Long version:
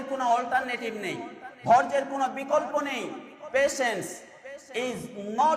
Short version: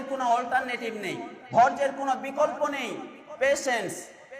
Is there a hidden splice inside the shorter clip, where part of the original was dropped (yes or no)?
yes